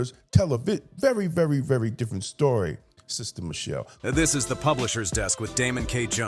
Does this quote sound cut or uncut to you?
cut